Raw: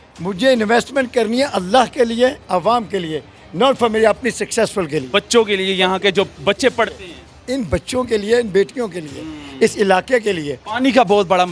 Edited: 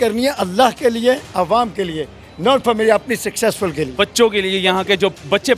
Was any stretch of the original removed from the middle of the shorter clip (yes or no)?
no